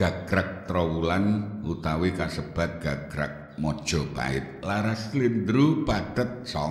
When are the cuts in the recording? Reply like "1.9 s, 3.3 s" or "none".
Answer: none